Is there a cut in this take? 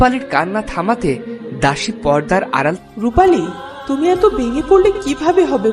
yes; 1 cut; at 2.8 s

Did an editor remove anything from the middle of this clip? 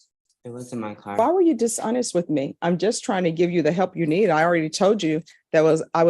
yes; 1 cut; at 1.2 s

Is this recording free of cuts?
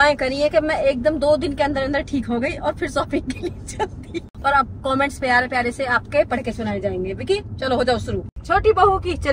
no; 2 cuts; at 4.3 s, 8.3 s

